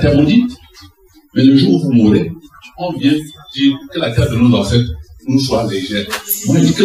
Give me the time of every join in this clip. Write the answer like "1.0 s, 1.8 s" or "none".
none